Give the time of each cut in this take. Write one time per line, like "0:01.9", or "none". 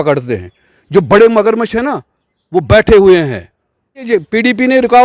0:04.1